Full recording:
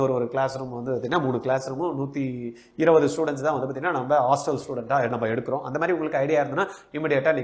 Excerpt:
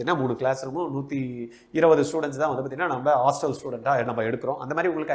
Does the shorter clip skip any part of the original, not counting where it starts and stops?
no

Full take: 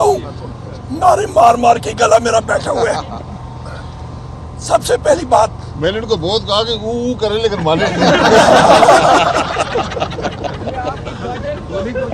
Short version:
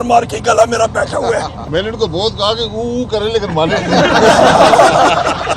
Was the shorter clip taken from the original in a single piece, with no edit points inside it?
no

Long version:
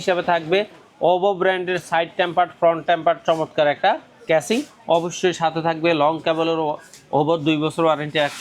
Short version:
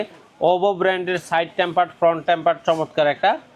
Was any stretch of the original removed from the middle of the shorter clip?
no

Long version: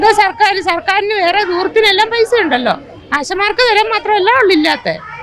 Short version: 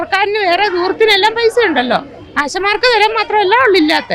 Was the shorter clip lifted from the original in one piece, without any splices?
yes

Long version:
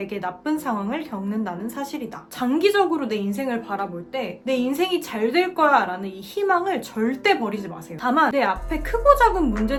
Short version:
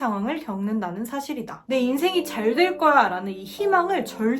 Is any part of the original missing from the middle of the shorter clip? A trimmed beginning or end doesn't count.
yes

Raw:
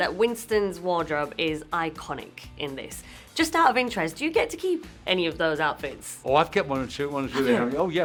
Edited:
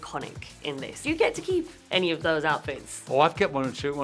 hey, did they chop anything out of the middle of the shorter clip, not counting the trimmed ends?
yes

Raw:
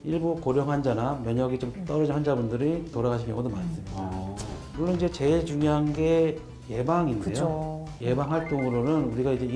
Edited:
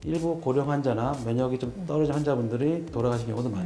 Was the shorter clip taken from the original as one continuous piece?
yes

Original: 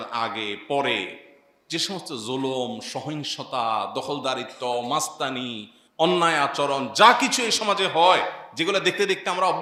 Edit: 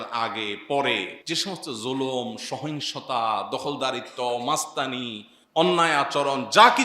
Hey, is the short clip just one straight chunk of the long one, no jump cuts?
no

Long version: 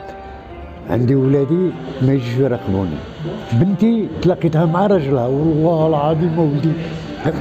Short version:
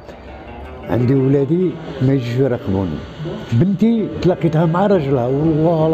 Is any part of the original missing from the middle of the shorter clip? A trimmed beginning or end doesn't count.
no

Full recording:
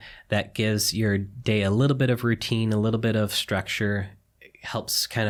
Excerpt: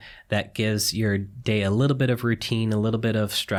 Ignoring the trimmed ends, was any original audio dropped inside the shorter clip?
no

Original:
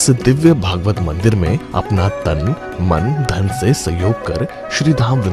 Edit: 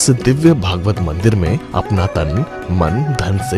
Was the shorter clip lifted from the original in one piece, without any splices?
no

